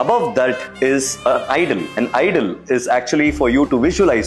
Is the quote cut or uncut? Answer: cut